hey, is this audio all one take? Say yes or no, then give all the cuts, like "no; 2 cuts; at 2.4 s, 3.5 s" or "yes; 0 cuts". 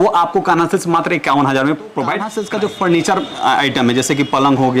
no; 1 cut; at 2.3 s